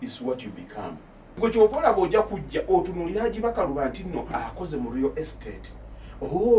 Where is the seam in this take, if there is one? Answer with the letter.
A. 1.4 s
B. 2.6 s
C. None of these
A